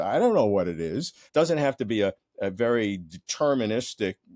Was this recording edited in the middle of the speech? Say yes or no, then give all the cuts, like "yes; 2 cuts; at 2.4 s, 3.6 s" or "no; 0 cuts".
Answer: yes; 1 cut; at 1.2 s